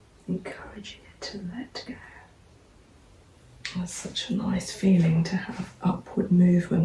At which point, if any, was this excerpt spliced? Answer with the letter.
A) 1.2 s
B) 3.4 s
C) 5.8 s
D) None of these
B